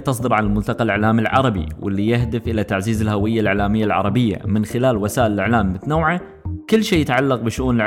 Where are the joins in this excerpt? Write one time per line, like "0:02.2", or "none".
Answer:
none